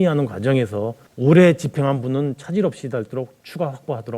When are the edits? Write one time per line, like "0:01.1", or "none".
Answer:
0:01.0